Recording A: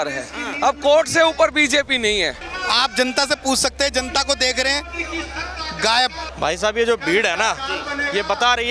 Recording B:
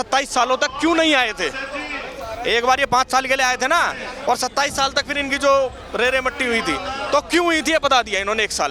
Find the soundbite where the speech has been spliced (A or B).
A